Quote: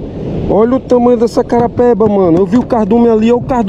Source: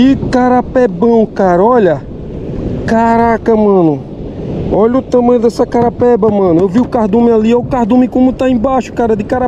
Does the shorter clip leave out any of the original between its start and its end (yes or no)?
no